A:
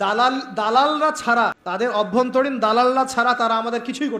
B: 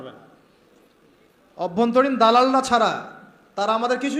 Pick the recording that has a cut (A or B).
A